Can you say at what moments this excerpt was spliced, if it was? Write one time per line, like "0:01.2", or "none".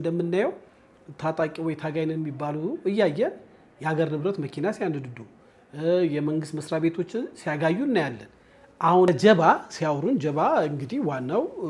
none